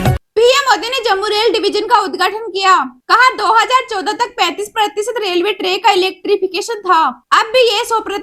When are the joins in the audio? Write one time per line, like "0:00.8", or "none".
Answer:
none

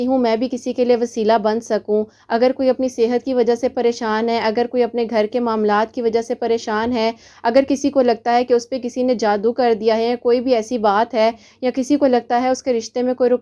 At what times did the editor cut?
none

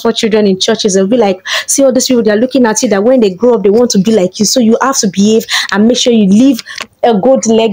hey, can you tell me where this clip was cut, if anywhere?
none

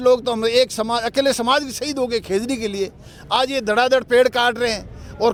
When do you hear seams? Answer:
none

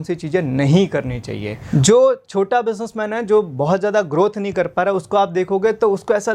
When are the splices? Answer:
0:01.5

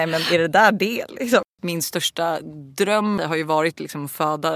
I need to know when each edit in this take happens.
0:01.5
0:03.2

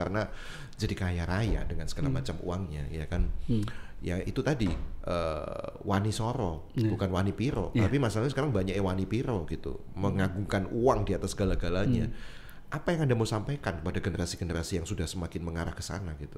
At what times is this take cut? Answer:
none

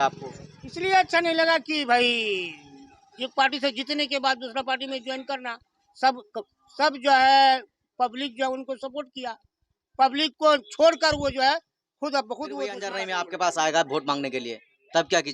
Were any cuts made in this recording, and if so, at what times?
0:13.0

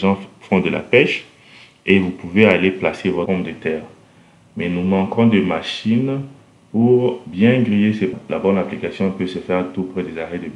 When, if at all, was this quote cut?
0:03.3
0:08.1

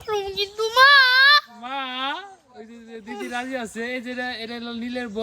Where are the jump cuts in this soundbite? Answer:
none

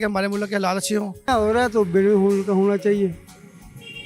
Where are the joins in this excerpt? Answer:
0:01.1

